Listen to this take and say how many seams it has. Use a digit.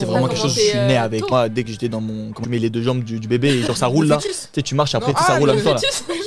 2